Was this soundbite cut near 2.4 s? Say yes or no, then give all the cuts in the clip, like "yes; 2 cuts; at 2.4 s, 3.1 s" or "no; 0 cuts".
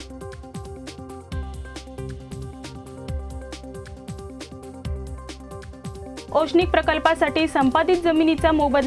yes; 1 cut; at 2.4 s